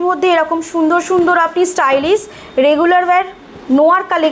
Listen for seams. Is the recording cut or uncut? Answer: uncut